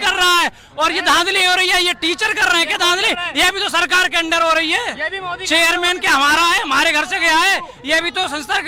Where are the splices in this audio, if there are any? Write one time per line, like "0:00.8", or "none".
none